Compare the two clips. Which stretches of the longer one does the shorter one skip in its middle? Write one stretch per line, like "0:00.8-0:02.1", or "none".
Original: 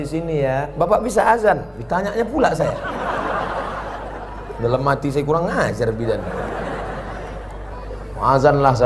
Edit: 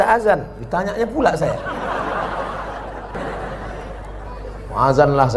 0:04.3-0:06.6